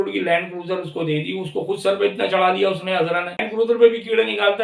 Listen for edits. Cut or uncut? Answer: cut